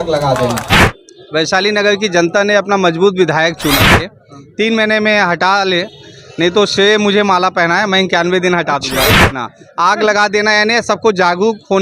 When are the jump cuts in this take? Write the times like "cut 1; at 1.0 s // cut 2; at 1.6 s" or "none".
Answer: cut 1; at 0.8 s // cut 2; at 4.1 s // cut 3; at 9.3 s